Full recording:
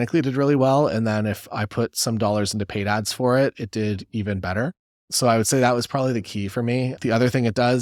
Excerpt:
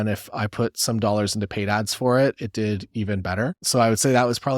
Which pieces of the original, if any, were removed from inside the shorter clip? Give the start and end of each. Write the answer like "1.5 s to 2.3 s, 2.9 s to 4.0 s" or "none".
4.8 s to 5.1 s